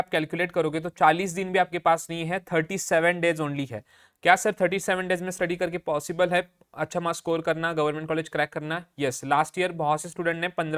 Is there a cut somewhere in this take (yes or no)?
no